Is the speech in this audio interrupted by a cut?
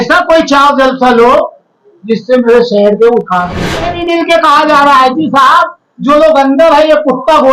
yes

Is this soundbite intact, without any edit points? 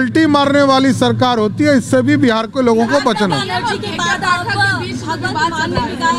yes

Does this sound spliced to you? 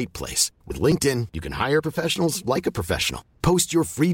no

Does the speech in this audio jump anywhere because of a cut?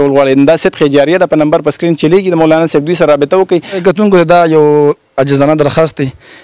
yes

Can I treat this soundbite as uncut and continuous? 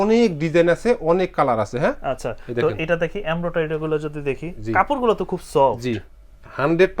yes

